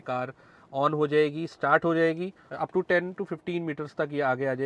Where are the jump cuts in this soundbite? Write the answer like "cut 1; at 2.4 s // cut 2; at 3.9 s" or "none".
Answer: cut 1; at 2.4 s